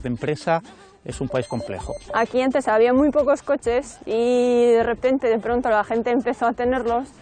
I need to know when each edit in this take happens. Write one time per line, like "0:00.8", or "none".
0:02.0